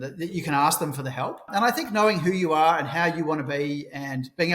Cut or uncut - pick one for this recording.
cut